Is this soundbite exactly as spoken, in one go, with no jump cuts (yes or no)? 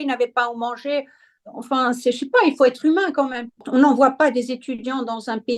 no